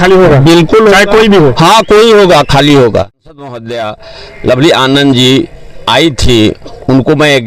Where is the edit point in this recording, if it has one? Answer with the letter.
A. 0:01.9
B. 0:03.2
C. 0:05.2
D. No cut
B